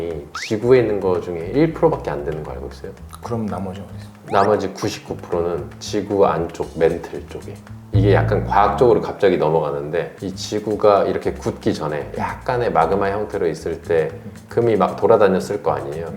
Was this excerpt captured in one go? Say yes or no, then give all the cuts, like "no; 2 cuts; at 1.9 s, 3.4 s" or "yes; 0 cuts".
no; 1 cut; at 7.8 s